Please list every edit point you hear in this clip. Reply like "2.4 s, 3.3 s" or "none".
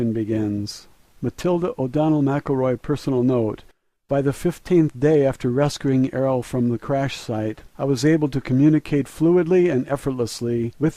none